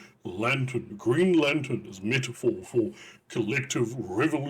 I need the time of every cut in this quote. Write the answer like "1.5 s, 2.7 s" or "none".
0.9 s

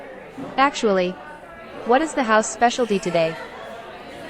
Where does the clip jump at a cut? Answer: 3.3 s

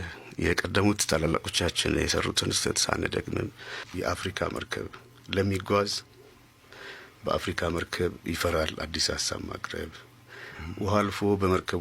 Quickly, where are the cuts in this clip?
3.8 s

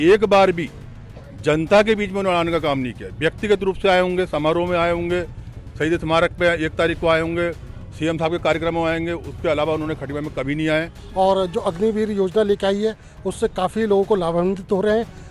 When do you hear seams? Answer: 11.0 s

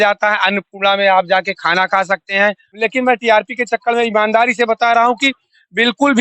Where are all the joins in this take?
2.7 s

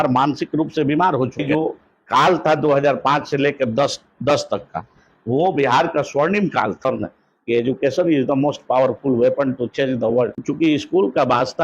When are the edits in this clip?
1.4 s, 6.8 s, 10.4 s

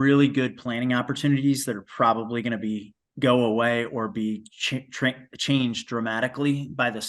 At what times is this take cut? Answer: none

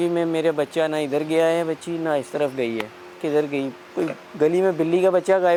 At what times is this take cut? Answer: none

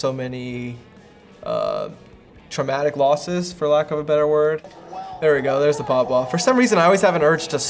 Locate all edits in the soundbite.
4.7 s

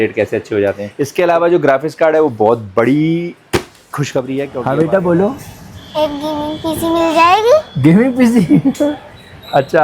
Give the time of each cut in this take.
0.9 s, 4.6 s

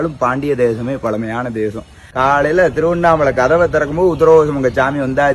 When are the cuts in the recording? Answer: 2.1 s

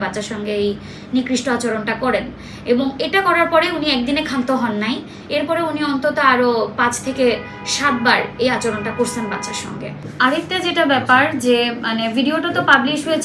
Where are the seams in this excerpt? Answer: none

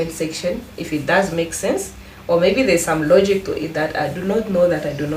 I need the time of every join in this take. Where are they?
none

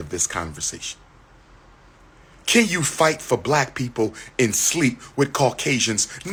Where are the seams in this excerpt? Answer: none

